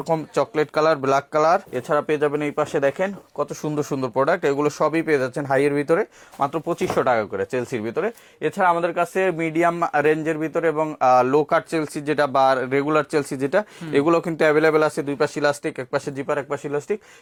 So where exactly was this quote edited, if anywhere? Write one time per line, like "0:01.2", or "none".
none